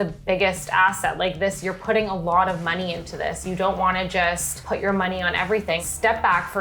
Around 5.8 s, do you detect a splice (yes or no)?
yes